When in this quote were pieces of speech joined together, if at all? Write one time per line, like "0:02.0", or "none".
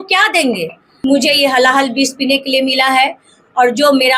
0:00.9